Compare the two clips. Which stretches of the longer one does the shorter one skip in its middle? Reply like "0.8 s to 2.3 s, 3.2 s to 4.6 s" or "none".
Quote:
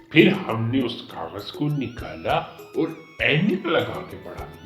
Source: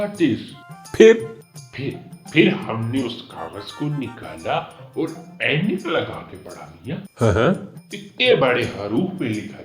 none